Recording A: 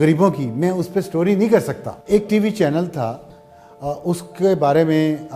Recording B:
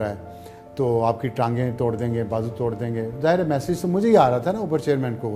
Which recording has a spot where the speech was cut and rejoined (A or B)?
A